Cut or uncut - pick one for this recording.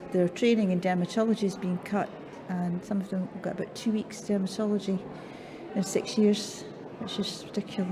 uncut